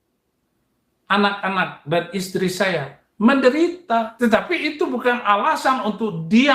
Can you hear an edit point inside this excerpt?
yes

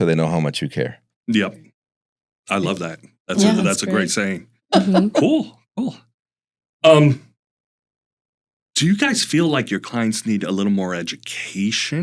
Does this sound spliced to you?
no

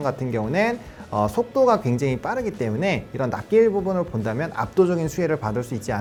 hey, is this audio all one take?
yes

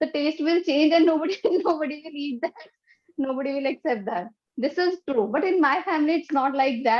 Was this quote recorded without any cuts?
yes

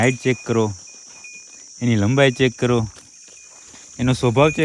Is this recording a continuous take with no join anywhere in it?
yes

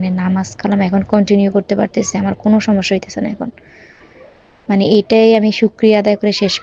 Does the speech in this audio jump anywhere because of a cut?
no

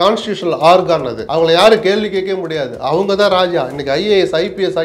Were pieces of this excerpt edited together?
yes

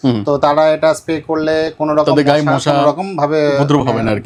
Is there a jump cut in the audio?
no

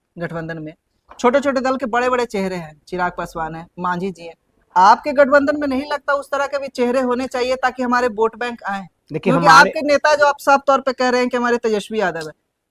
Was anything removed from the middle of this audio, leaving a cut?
no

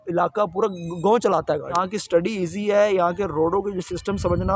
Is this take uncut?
no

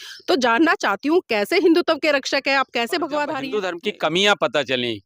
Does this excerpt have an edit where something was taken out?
yes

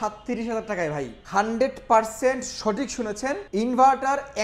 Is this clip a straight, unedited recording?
no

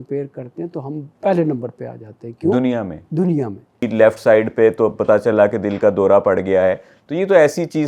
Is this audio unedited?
no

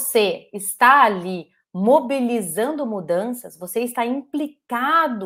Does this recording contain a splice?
no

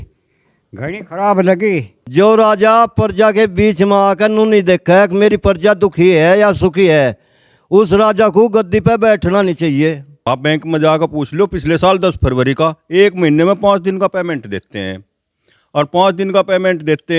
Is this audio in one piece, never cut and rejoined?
no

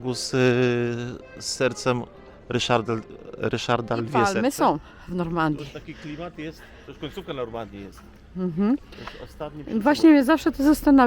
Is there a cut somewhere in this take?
yes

